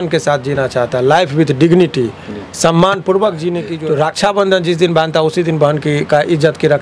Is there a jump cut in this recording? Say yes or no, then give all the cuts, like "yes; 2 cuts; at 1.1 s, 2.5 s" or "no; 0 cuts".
yes; 1 cut; at 3.7 s